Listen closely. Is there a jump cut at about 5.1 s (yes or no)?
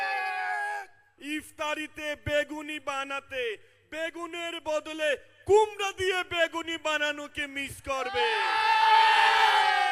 no